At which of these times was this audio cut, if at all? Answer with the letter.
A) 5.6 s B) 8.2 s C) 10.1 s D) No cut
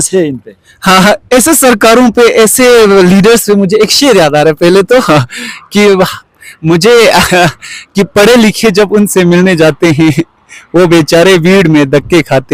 D